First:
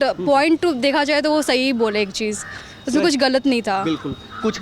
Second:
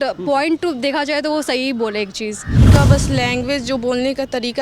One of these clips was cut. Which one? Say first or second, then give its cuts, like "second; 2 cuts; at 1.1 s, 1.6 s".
second; 1 cut; at 2.7 s